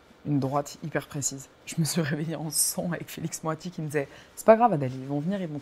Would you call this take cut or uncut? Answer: cut